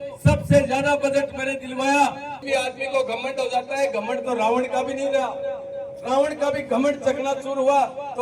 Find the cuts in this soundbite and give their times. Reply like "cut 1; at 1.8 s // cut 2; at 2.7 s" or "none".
cut 1; at 2.3 s